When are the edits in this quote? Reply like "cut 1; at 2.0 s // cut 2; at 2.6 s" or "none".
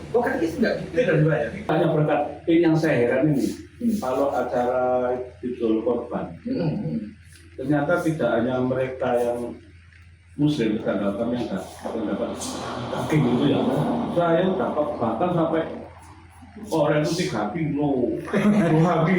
cut 1; at 1.7 s